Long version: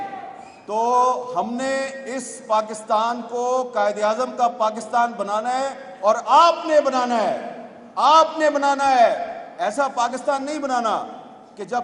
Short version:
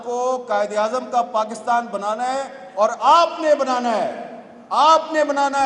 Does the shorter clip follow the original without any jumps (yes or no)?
yes